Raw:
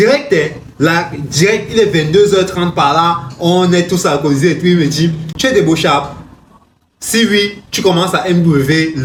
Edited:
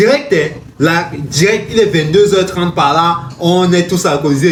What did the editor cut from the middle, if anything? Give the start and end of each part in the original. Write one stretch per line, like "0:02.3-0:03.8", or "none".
none